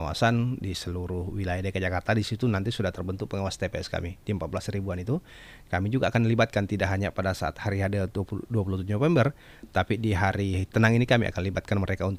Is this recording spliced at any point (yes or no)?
no